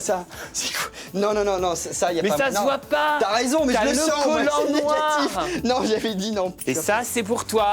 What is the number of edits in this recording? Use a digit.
1